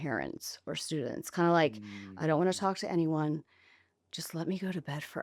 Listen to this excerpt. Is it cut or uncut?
uncut